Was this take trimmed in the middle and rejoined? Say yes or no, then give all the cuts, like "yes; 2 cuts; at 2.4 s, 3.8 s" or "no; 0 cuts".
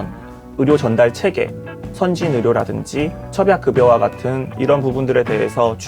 yes; 1 cut; at 4.5 s